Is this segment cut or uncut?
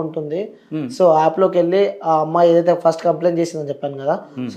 uncut